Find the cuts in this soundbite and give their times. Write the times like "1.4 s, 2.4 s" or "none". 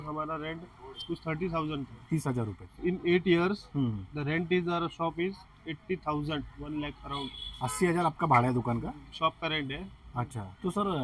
2.7 s